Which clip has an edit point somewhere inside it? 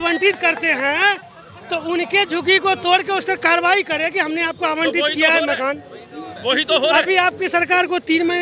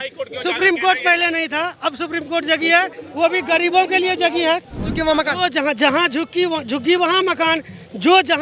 second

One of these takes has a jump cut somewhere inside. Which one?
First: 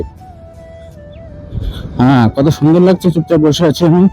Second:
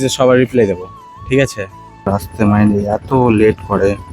second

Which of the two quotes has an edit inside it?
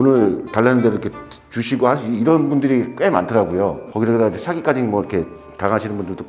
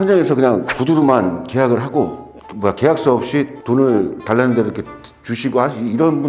first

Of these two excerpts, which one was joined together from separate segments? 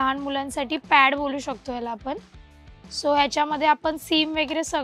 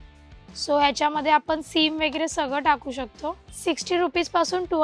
second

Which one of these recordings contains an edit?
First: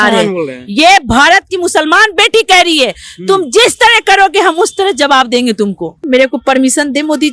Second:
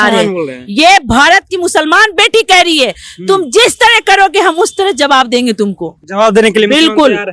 first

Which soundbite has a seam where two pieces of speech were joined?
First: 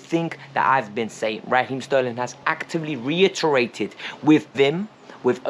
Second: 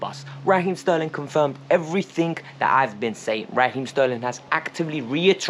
first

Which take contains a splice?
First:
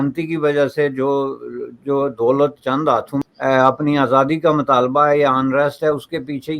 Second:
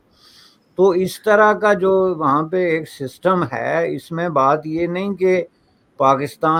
first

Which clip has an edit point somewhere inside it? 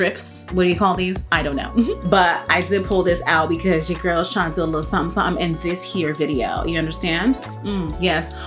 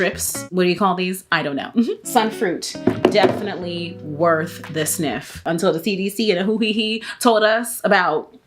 second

